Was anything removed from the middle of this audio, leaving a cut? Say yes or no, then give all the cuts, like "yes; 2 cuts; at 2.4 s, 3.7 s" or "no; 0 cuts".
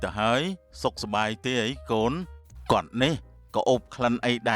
yes; 1 cut; at 2.3 s